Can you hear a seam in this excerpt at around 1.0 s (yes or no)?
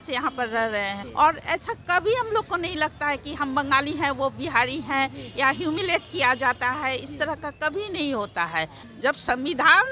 yes